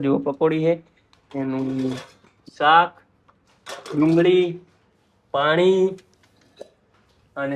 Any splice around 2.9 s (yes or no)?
no